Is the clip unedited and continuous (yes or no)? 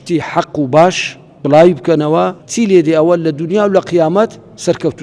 no